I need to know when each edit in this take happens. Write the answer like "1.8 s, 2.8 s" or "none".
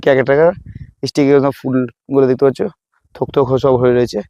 none